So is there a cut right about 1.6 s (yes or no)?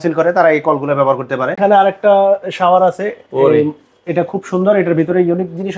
yes